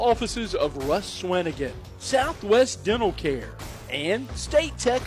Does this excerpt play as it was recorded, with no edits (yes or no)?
yes